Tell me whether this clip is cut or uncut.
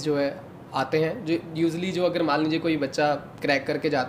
uncut